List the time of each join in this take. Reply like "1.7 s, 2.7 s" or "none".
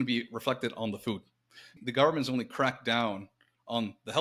1.7 s